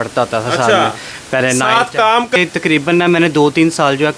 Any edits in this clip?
yes; 1 cut; at 2.4 s

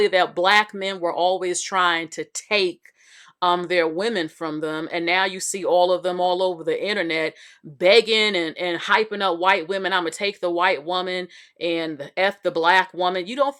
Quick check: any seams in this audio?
no; 0 cuts

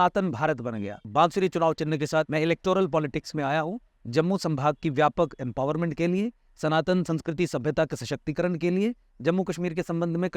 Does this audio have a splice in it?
yes; 2 cuts; at 1.1 s, 2.3 s

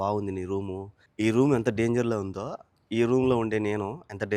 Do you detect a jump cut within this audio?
yes; 1 cut; at 1.0 s

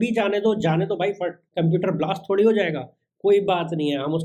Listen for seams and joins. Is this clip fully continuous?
no; 1 cut; at 1.4 s

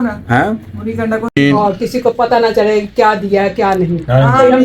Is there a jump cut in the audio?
yes; 1 cut; at 1.3 s

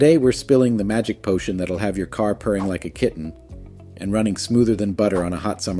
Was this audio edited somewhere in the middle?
no; 0 cuts

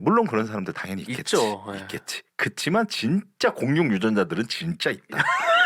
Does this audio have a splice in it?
no; 0 cuts

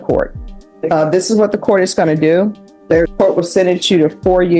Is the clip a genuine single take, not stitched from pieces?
no; 1 cut; at 3.1 s

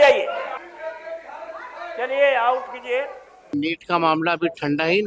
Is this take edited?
no; 0 cuts

